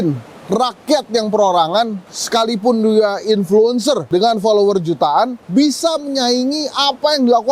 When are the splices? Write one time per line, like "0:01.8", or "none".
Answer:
none